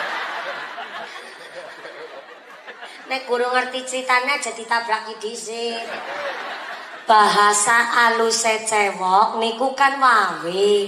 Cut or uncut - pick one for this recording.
uncut